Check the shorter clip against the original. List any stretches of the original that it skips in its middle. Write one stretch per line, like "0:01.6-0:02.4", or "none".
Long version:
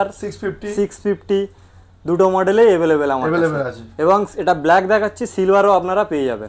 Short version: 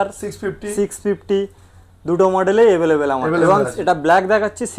0:03.4-0:04.0